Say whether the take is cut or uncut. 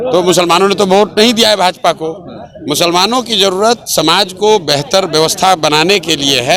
uncut